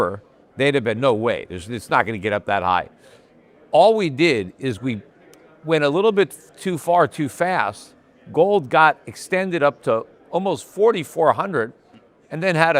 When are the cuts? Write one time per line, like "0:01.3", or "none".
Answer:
none